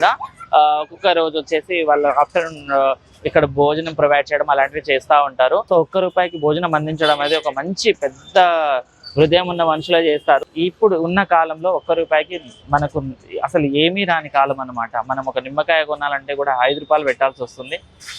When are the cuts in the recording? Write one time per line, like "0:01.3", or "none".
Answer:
0:05.6
0:10.5